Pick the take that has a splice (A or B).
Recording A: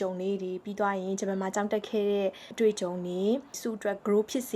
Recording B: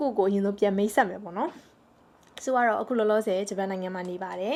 A